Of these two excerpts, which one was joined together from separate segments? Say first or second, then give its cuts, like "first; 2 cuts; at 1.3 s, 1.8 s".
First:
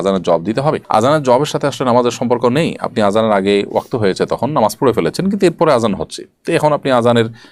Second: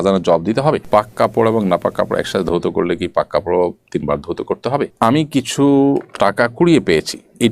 second; 2 cuts; at 0.8 s, 4.9 s